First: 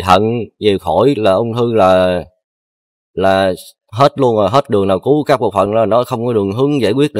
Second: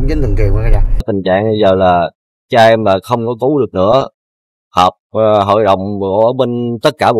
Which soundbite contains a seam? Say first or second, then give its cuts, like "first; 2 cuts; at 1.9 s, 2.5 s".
second; 1 cut; at 1.1 s